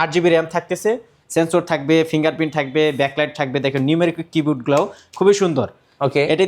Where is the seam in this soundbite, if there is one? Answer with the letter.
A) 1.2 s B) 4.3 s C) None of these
A